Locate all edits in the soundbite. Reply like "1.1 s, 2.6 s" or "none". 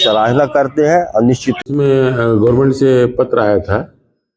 1.6 s

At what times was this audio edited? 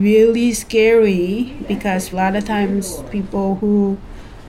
2.1 s

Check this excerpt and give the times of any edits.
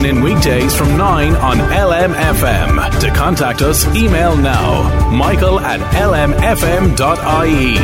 none

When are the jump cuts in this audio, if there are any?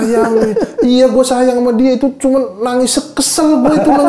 none

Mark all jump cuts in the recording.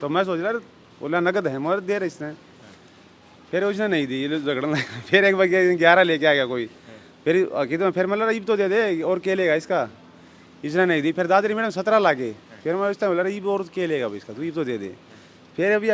none

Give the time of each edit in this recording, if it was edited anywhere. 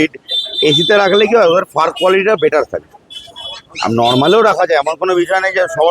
none

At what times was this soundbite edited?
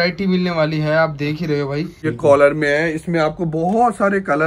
1.9 s

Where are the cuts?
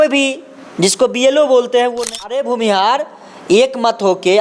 2.3 s

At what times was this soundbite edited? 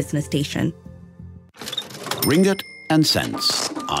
1.1 s

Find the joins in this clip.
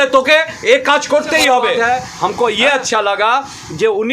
1.7 s

